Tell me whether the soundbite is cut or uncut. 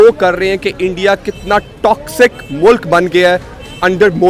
uncut